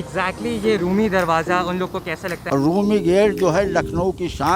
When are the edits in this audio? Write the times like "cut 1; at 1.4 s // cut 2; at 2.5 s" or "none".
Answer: cut 1; at 2.3 s

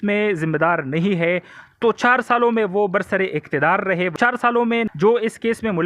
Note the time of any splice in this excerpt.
cut 1; at 4.2 s

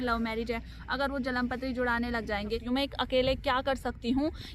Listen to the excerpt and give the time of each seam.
cut 1; at 2.6 s

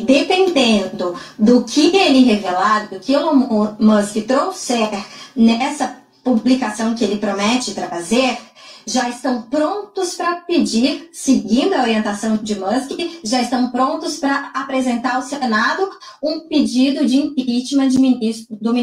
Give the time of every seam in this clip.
none

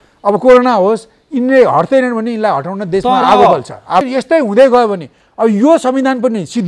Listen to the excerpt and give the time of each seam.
cut 1; at 4.1 s

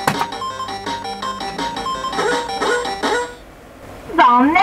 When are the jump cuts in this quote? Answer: none

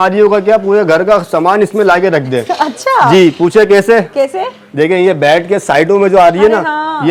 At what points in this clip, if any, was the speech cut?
none

